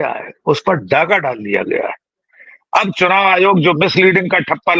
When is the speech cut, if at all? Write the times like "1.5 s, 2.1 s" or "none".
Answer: none

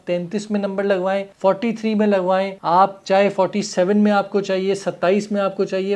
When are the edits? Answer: 1.3 s, 2.6 s

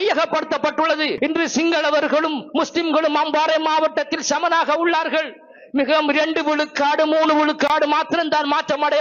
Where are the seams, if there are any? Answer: 1.1 s

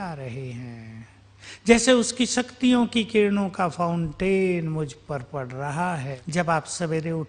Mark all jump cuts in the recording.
6.1 s

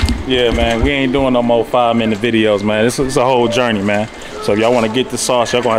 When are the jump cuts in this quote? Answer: none

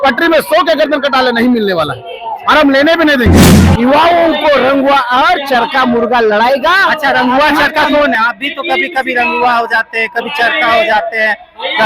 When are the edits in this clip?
3.5 s

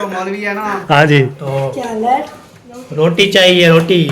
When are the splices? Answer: 1.4 s

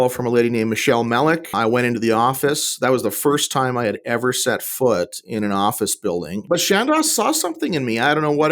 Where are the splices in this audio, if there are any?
6.4 s

